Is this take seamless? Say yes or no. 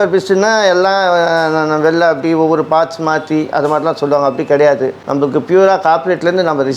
yes